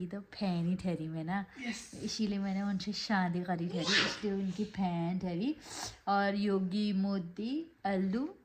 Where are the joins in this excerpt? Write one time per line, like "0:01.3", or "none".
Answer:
none